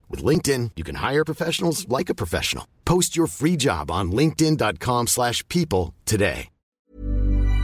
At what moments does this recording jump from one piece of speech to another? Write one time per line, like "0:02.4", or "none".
0:06.7